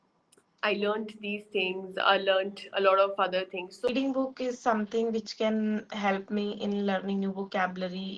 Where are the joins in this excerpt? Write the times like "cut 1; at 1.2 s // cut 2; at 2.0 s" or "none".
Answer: cut 1; at 3.9 s